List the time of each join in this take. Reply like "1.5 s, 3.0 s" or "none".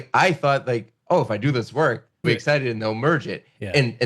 2.3 s